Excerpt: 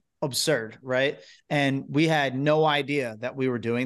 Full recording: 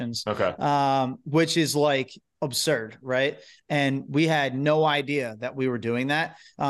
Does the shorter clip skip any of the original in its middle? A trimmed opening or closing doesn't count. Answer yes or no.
no